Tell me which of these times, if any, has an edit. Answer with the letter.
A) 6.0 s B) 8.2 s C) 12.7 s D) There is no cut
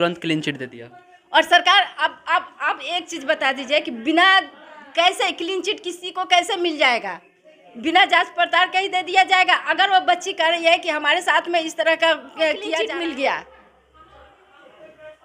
C